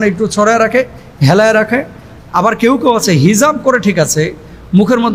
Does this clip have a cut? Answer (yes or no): no